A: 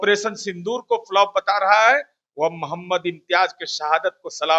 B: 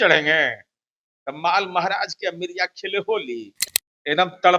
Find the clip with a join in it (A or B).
B